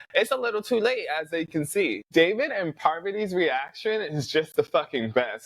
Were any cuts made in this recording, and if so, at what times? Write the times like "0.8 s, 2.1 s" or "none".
2.0 s